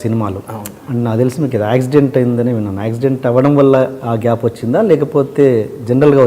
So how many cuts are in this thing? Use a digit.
0